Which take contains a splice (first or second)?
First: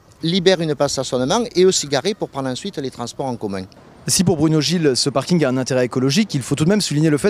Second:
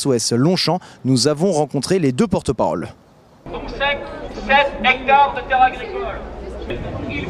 first